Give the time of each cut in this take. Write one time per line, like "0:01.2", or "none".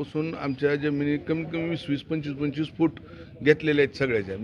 none

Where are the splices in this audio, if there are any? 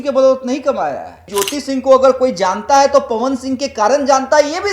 0:01.2

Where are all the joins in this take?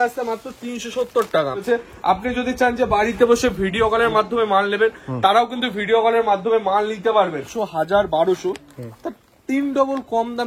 0:01.6
0:07.5

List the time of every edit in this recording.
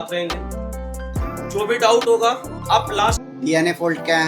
0:03.2

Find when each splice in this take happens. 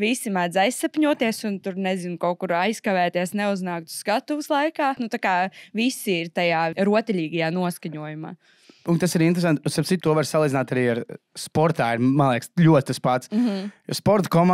0:05.0
0:06.7
0:10.0

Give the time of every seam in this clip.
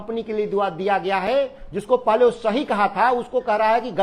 none

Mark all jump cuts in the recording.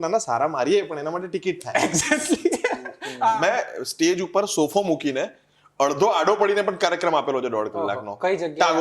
0:03.3

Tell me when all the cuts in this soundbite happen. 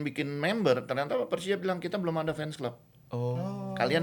none

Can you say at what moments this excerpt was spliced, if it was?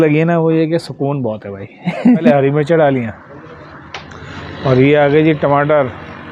0:02.3

